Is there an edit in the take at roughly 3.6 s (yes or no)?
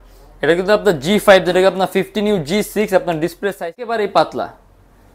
yes